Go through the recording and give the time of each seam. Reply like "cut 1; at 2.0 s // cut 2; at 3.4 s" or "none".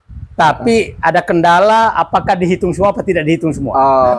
none